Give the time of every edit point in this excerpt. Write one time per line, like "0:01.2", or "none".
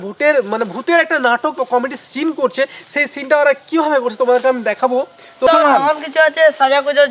0:05.5